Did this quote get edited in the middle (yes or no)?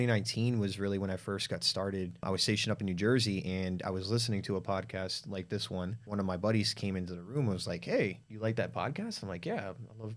yes